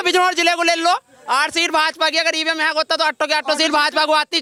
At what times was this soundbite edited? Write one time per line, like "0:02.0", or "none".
none